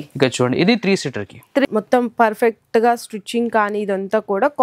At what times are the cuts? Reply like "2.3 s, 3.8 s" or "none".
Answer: 1.7 s